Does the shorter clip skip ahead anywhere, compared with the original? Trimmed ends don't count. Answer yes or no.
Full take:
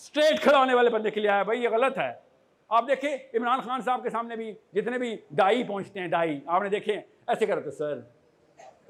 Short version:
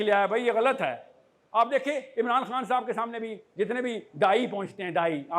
no